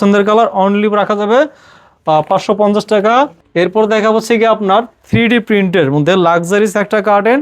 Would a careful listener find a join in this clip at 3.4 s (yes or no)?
yes